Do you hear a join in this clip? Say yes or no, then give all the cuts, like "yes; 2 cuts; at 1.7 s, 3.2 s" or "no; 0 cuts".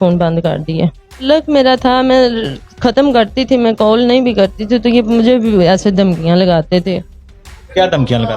yes; 1 cut; at 1.2 s